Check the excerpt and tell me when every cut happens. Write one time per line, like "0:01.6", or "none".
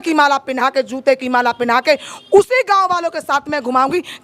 none